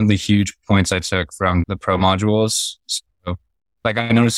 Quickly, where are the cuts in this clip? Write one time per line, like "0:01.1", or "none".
0:01.6